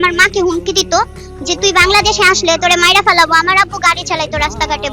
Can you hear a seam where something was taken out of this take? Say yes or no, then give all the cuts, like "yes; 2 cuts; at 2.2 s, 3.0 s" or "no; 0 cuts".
no; 0 cuts